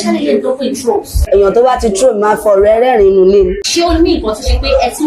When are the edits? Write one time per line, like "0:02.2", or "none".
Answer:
0:01.2
0:03.6